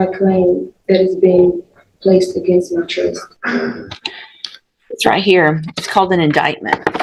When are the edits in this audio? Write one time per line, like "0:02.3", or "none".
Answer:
none